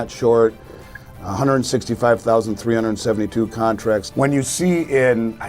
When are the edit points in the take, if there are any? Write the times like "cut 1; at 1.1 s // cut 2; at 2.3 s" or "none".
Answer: cut 1; at 4.1 s